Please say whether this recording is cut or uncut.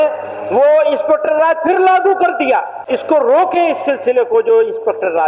cut